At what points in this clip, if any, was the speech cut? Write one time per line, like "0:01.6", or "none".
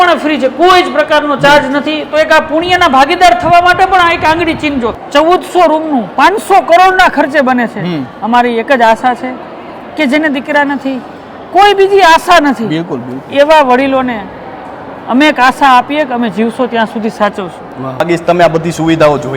0:05.0
0:18.0